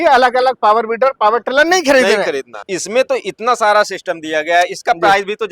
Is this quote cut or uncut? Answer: cut